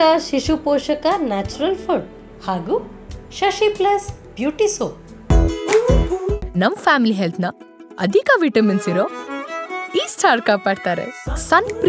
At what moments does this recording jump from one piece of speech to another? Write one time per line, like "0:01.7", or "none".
0:05.1